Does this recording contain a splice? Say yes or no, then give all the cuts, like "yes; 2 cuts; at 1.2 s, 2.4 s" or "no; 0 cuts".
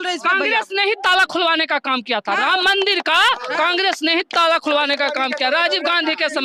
no; 0 cuts